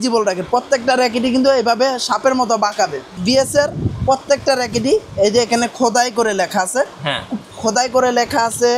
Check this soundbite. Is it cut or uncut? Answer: cut